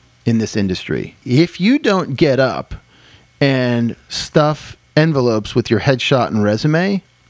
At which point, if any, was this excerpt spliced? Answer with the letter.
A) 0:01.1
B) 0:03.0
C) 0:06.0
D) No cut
A